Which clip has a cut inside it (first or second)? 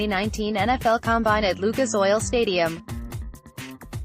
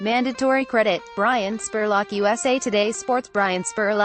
first